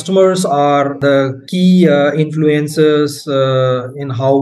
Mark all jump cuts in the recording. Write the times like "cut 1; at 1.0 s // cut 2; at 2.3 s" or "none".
none